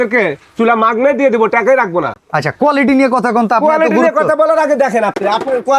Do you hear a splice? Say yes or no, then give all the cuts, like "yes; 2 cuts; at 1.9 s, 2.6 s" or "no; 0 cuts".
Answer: no; 0 cuts